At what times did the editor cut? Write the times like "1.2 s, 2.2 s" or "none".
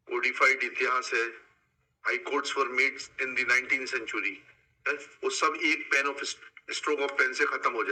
none